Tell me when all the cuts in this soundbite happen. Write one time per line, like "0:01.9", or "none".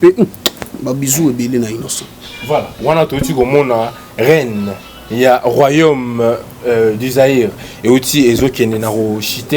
none